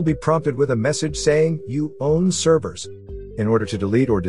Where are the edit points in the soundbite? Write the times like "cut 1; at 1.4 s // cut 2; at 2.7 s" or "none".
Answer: none